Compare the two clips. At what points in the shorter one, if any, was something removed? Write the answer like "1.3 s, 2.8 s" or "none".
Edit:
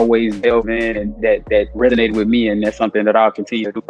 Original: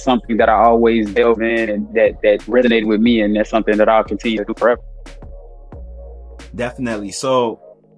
none